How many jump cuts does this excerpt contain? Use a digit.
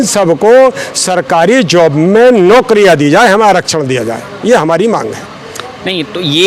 0